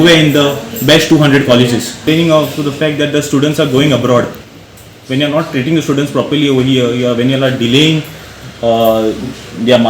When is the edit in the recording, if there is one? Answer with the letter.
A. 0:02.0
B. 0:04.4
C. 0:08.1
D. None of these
A